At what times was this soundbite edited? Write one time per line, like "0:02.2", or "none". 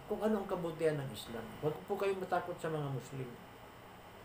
0:01.4

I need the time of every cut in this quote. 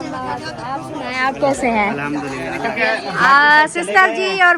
0:02.8

